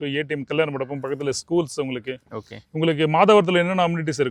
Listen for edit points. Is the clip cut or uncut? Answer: uncut